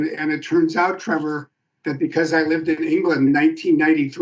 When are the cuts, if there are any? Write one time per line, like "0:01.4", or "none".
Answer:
0:03.3